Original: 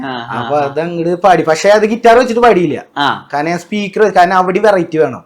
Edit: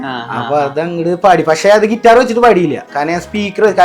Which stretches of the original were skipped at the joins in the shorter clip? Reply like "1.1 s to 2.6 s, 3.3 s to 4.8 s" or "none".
2.9 s to 3.2 s

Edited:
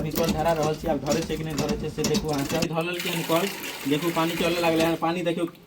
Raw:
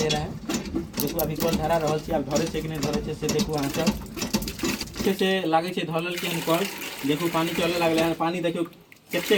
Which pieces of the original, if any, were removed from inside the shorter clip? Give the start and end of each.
3.9 s to 5.8 s

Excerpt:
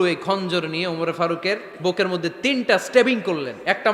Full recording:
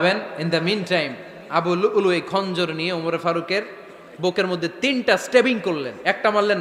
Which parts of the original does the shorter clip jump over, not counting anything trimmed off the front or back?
3.8 s to 4.1 s

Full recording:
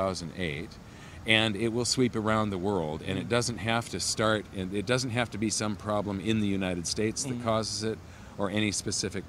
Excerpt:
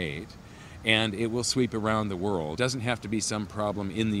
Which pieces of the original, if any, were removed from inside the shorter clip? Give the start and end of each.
3.0 s to 4.9 s

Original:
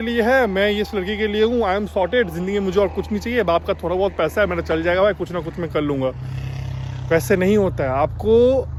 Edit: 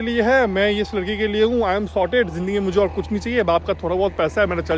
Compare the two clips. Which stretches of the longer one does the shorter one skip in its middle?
none

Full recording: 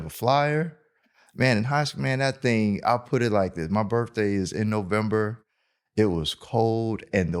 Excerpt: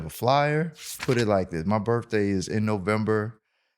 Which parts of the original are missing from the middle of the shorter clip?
1.0 s to 3.0 s

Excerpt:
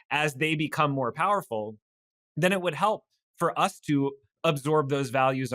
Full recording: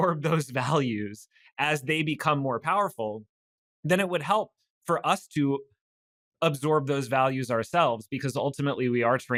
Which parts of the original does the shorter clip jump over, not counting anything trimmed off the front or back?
5.7 s to 6.2 s

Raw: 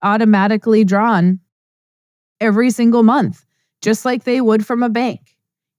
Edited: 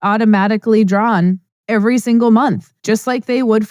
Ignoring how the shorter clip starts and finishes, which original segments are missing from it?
1.5 s to 2.2 s, 3.4 s to 3.7 s

